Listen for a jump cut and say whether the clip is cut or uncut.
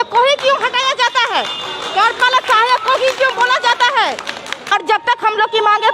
cut